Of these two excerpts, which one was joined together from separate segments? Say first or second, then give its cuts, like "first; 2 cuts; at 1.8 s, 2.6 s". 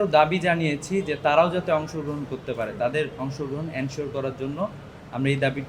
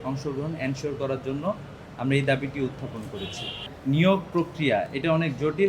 second; 1 cut; at 3.7 s